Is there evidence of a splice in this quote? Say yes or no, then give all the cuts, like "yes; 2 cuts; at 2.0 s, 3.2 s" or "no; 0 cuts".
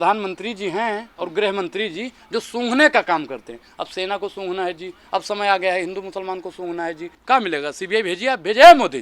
yes; 1 cut; at 7.2 s